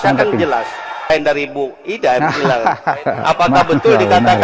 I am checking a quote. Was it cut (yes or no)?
yes